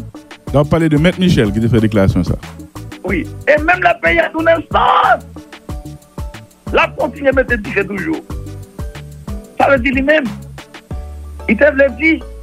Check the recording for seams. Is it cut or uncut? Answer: cut